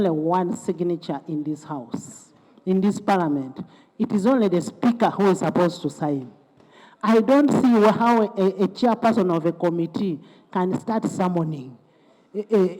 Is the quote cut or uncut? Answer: uncut